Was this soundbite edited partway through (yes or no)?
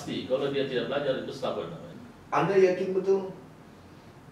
yes